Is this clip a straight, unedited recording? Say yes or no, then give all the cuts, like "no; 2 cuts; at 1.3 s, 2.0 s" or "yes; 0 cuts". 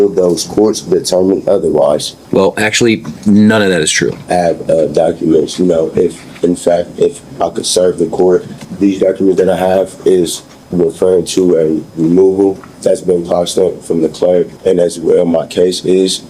no; 5 cuts; at 2.1 s, 4.2 s, 8.6 s, 12.7 s, 14.5 s